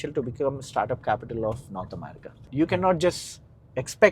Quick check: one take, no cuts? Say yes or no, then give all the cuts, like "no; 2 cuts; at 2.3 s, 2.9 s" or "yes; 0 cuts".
no; 1 cut; at 2.5 s